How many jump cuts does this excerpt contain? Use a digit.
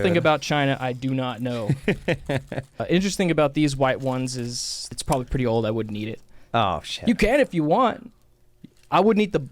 2